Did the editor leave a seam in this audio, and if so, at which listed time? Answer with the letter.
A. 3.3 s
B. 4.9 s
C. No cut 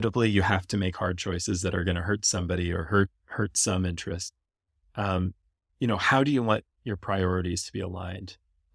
C